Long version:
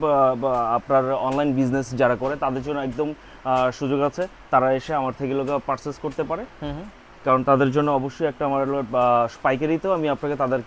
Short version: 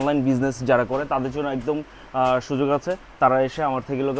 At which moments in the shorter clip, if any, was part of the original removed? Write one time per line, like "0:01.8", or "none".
none

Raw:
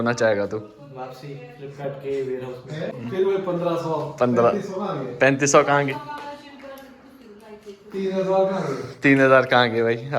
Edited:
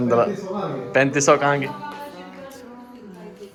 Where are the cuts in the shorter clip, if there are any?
none

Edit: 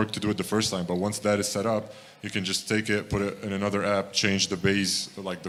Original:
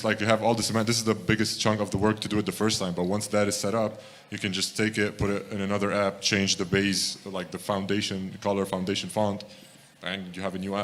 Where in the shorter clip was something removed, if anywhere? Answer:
none

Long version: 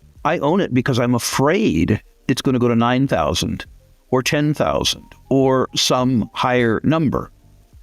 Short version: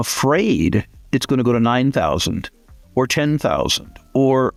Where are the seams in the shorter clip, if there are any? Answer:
none

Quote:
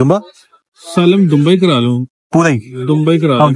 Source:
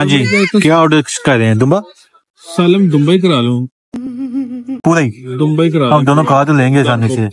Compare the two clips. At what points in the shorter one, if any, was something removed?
0:02.2

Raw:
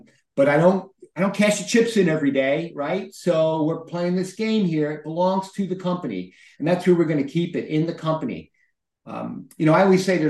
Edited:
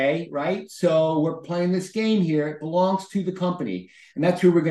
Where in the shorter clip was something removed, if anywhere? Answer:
none

